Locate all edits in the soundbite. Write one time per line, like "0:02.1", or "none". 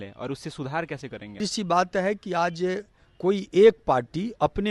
0:01.5